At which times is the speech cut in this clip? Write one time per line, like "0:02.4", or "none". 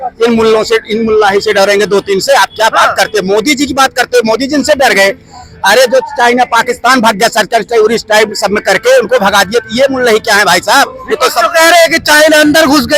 none